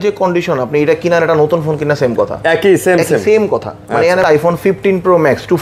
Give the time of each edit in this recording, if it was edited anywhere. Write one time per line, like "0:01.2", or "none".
0:04.2